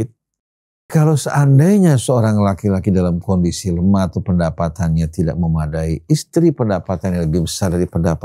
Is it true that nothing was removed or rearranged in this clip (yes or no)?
no